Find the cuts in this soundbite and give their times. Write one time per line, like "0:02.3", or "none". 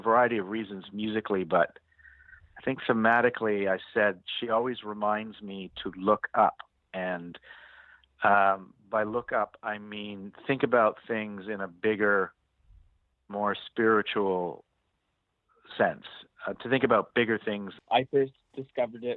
0:17.7